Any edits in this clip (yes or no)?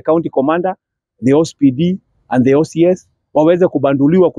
no